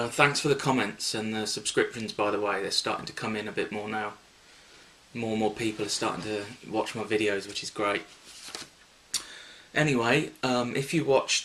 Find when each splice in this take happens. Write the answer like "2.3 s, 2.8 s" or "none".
3.1 s